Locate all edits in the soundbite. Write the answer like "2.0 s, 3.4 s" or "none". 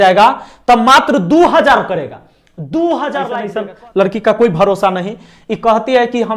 3.4 s